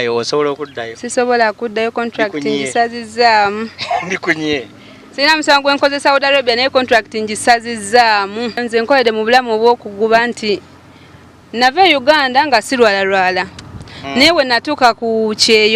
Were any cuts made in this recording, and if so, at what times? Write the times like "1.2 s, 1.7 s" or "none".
8.6 s